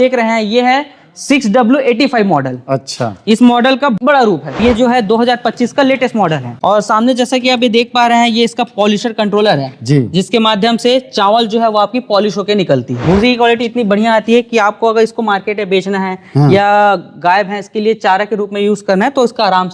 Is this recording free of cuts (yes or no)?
no